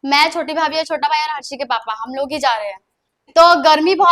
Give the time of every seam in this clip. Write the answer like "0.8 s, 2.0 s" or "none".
none